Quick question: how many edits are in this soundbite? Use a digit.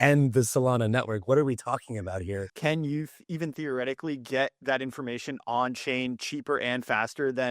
1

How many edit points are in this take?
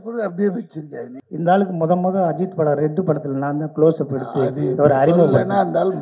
1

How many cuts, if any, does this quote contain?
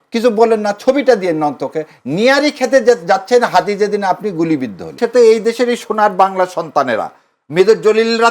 1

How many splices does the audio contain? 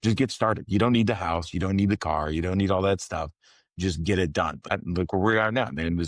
1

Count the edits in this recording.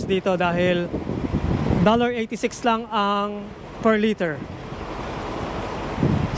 0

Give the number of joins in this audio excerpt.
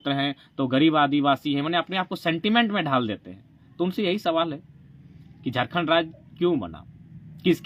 0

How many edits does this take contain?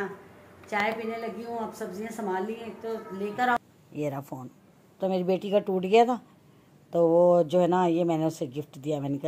1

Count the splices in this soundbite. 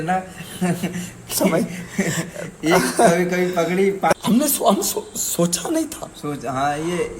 1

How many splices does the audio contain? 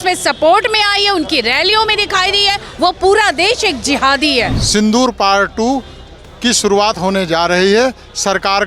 2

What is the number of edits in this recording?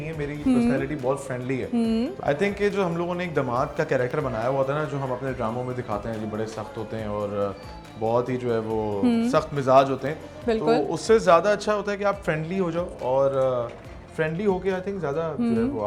0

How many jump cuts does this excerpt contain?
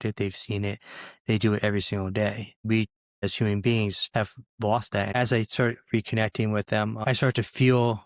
4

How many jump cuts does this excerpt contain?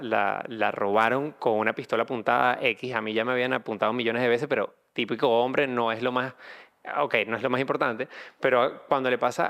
0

